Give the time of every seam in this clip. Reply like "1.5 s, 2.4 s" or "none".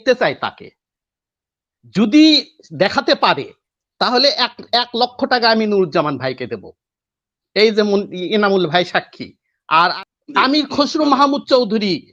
9.9 s